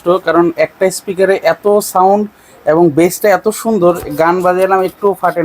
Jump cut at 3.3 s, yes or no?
no